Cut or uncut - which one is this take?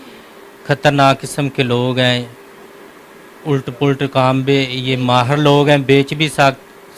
uncut